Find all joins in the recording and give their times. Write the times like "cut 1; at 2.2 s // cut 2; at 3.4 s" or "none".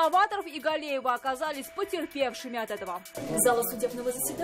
cut 1; at 3.1 s